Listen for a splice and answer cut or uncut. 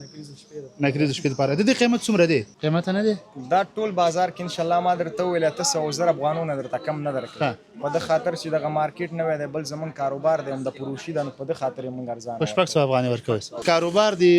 cut